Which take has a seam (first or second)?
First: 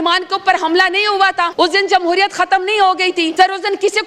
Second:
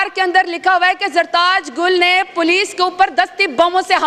first